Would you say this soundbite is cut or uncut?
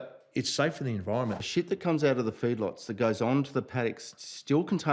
cut